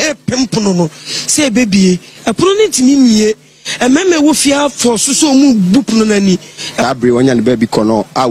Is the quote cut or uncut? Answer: cut